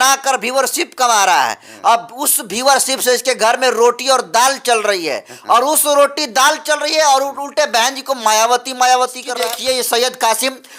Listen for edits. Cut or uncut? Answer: cut